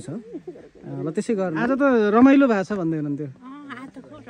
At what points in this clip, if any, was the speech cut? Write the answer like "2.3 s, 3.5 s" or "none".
1.6 s